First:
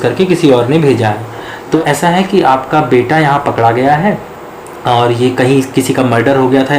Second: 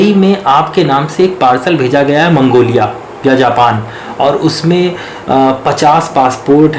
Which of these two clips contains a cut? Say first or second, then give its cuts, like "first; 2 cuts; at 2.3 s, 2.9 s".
first; 1 cut; at 1.8 s